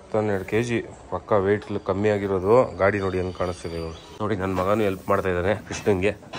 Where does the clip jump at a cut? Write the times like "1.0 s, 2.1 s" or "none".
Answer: 4.0 s